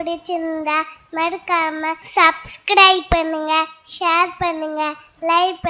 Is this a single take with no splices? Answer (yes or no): no